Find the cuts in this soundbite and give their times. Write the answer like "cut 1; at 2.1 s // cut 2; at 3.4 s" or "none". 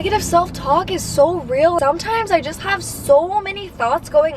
cut 1; at 1.8 s